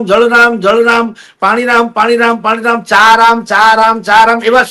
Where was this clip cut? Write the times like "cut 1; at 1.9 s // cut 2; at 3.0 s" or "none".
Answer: none